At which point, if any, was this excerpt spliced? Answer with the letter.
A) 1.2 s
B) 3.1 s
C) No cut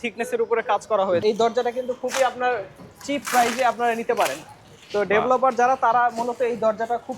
A